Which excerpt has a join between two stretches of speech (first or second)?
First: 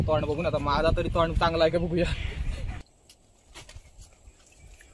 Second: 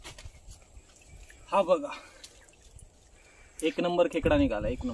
first